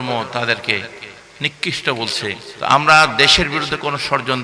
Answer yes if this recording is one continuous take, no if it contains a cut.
no